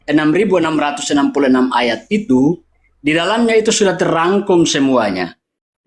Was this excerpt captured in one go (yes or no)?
yes